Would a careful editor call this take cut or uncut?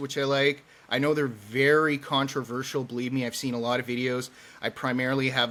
uncut